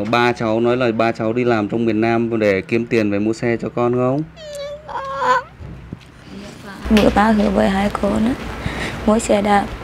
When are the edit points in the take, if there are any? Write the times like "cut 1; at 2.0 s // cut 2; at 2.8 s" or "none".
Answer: cut 1; at 6.8 s